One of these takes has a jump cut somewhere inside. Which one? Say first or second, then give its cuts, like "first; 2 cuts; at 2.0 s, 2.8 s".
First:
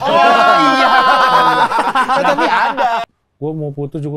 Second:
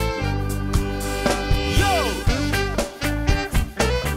first; 1 cut; at 3.1 s